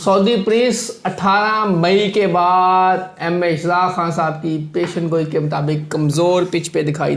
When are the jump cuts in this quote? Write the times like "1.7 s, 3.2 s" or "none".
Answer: none